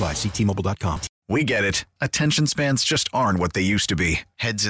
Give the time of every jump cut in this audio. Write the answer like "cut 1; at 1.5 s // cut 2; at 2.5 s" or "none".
cut 1; at 1.1 s

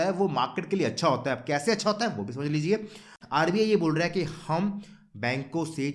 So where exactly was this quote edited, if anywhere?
cut 1; at 3.2 s

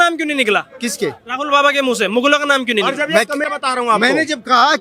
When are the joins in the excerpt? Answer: cut 1; at 3.4 s

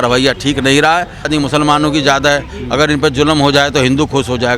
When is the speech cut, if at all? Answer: cut 1; at 1.3 s

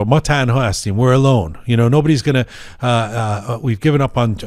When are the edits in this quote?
none

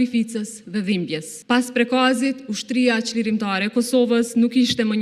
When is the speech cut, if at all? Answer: cut 1; at 1.3 s

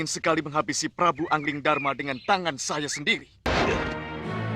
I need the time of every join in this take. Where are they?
cut 1; at 3.5 s

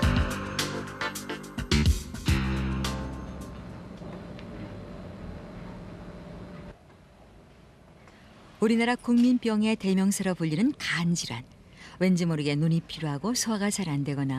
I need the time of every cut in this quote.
none

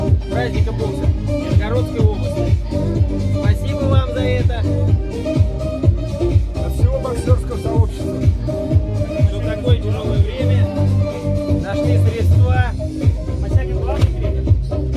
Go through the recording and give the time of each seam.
none

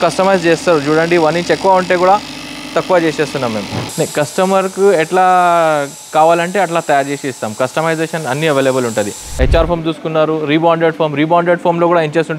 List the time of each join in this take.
cut 1; at 3.6 s // cut 2; at 9.2 s

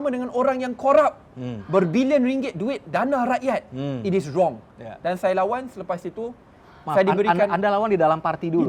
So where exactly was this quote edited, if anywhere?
none

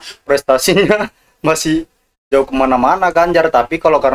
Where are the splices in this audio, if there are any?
none

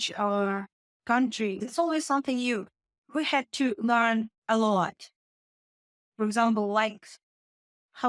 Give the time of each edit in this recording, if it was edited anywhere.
none

